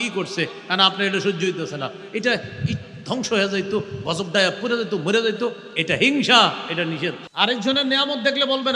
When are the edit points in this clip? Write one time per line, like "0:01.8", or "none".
0:07.2